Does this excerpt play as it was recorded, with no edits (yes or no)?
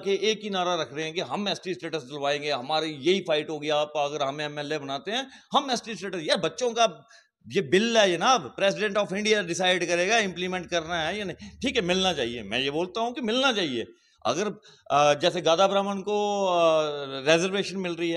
yes